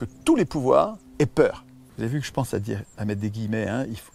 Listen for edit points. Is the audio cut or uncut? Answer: cut